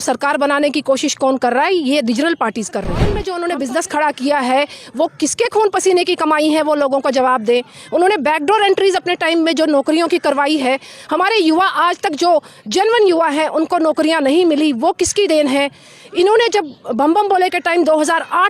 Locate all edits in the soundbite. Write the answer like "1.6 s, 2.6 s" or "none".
3.1 s